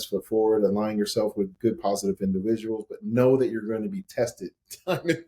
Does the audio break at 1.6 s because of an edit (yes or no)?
no